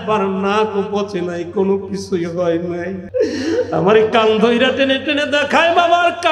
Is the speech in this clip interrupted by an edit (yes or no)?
yes